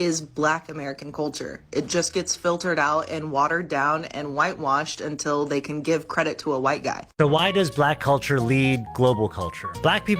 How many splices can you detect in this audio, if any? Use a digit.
2